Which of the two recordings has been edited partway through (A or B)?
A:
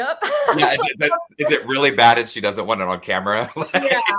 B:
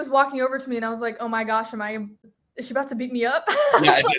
B